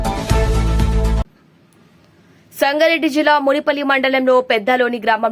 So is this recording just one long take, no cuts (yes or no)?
no